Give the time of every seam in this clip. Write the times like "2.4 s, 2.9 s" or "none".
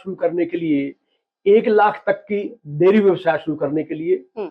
none